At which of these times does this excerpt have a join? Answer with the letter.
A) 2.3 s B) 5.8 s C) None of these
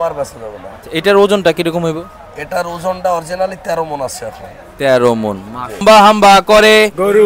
B